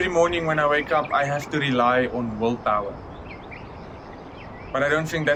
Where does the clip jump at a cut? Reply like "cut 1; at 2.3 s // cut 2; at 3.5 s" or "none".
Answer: none